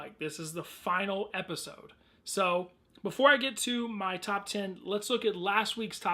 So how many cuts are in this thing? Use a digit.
1